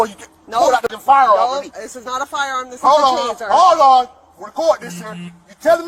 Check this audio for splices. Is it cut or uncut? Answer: cut